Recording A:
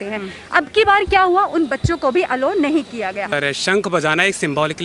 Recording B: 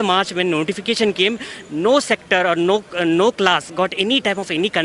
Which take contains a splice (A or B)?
A